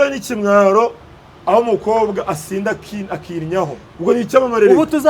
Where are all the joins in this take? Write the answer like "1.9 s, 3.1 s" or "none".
3.8 s